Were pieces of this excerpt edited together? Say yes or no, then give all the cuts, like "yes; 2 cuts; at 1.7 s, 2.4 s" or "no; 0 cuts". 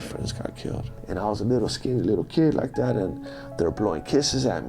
yes; 1 cut; at 0.9 s